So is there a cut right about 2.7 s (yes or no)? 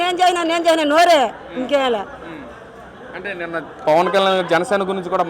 no